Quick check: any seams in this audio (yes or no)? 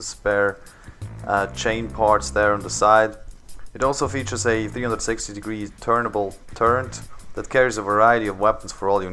yes